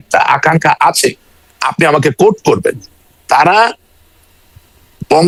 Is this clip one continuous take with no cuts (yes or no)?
yes